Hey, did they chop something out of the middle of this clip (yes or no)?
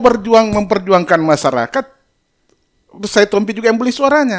no